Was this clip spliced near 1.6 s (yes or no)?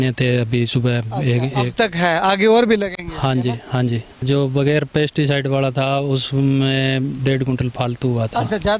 no